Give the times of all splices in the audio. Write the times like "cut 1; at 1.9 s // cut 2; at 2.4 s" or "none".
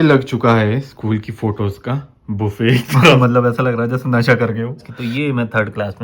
cut 1; at 3.2 s // cut 2; at 4.9 s